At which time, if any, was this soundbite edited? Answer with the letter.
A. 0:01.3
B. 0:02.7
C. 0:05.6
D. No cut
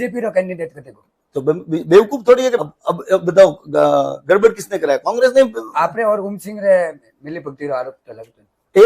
B